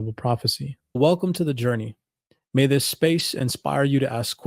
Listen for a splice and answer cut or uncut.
cut